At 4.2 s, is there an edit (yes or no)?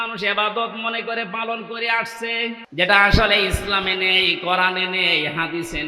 no